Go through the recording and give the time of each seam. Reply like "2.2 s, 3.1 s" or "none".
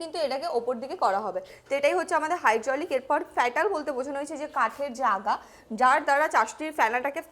none